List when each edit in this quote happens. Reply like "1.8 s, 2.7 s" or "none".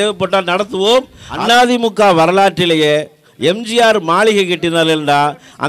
1.2 s